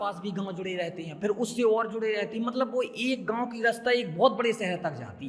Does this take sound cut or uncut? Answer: uncut